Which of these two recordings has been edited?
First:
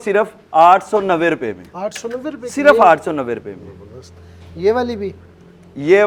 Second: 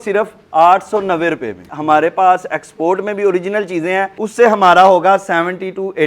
second; 2 cuts; at 1.7 s, 4.2 s

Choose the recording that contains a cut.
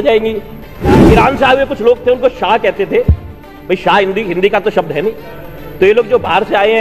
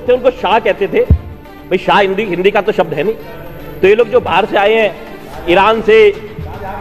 first; 1 cut; at 1.0 s

